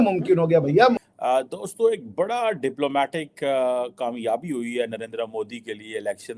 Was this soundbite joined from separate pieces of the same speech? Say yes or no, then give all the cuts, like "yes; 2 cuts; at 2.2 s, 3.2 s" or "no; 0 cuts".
yes; 1 cut; at 1.0 s